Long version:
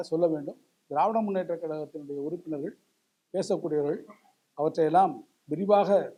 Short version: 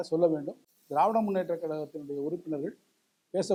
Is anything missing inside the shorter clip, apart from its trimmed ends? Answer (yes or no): no